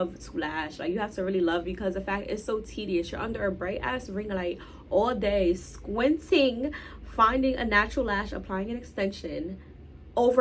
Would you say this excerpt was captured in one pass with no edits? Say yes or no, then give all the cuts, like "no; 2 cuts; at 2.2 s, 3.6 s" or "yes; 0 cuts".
yes; 0 cuts